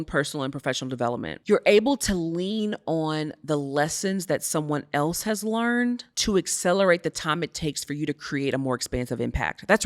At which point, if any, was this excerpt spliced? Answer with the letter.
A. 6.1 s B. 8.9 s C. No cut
A